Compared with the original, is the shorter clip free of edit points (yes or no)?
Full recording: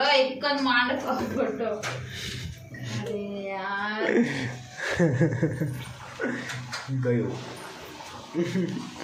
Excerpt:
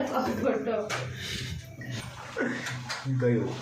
no